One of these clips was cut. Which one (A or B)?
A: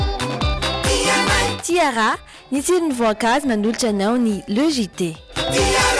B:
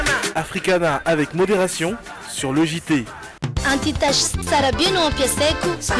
B